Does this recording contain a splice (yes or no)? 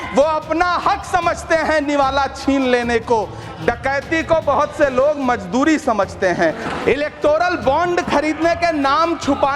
yes